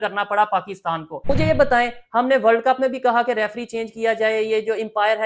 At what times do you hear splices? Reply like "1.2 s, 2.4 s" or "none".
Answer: 1.3 s